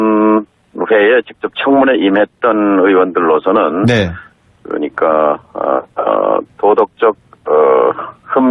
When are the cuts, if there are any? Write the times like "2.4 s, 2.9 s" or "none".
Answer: 1.8 s